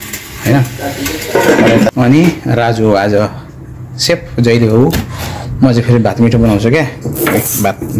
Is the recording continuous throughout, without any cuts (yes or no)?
no